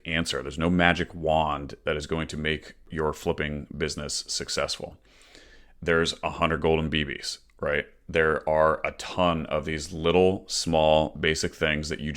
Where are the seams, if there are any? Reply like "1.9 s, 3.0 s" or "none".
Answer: 2.9 s